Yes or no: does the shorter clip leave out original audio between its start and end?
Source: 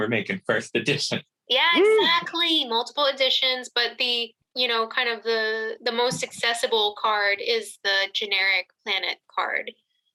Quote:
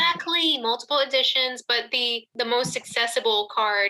yes